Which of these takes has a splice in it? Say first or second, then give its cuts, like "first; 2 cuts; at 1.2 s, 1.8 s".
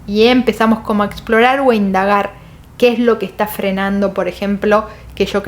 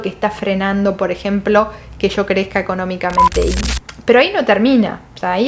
second; 1 cut; at 3.5 s